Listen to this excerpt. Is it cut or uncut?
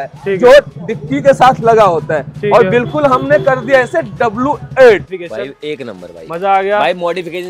cut